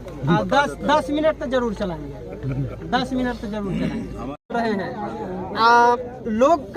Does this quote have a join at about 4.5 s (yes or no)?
yes